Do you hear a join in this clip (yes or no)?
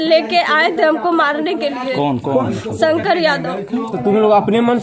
yes